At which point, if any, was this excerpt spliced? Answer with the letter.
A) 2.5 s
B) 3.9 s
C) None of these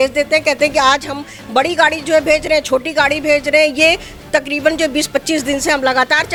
C